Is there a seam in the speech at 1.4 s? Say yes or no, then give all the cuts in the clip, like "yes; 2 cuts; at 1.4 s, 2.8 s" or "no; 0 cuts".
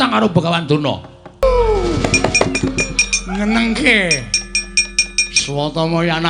yes; 1 cut; at 1.4 s